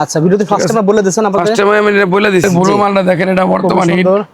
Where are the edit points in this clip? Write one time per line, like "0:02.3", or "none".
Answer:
0:02.4